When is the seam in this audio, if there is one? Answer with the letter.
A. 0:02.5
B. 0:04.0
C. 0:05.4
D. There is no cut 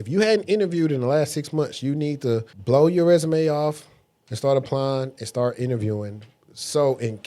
A